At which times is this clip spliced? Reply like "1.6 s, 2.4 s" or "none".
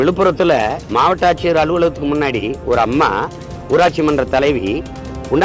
none